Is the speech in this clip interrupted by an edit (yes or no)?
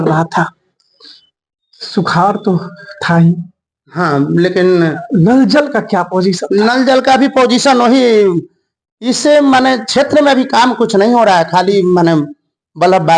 no